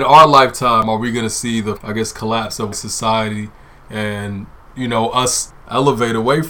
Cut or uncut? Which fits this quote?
cut